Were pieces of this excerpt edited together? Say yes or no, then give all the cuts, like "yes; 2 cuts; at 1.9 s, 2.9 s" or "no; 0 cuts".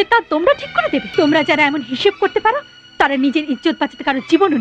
yes; 1 cut; at 1.1 s